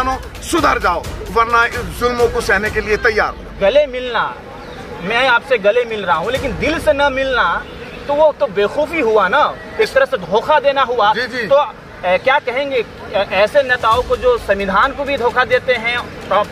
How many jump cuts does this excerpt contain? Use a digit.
1